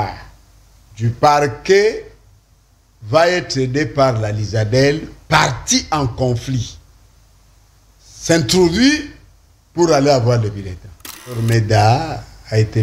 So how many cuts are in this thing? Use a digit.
1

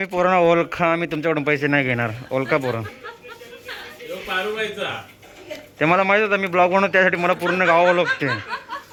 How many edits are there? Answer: 0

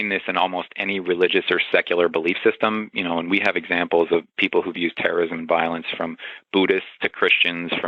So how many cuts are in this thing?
0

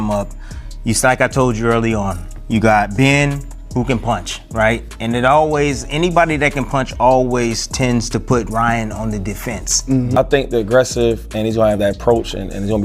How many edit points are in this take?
1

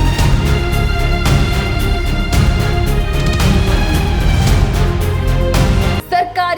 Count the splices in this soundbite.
1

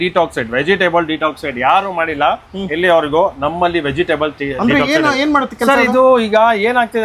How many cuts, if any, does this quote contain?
0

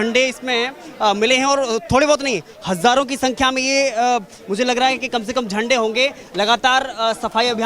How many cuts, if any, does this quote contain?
0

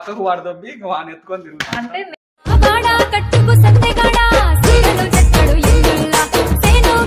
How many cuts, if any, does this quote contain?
0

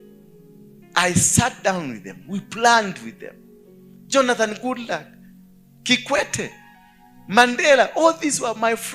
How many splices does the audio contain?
0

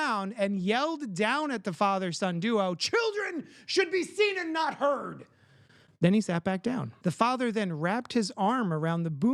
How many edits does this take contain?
1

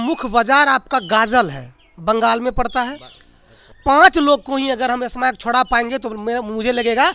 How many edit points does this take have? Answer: 1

